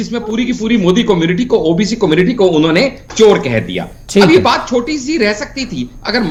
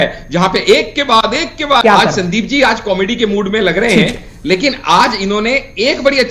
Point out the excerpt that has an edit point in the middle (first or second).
second